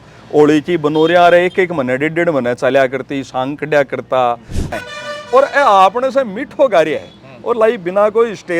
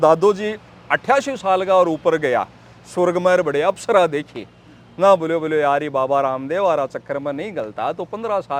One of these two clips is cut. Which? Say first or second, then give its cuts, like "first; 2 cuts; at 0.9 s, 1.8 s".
first; 1 cut; at 4.7 s